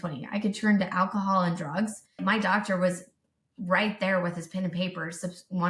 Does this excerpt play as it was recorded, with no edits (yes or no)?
no